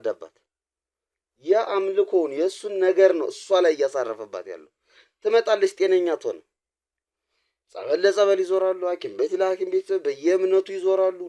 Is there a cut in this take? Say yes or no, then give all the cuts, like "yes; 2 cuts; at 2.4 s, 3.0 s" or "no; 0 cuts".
no; 0 cuts